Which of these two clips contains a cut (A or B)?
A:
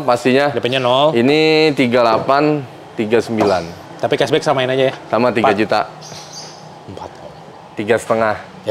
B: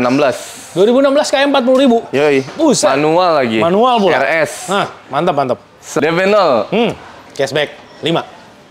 B